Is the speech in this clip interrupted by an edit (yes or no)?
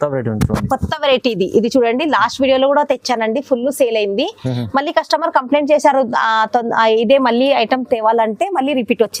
no